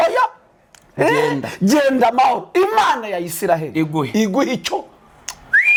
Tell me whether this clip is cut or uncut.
uncut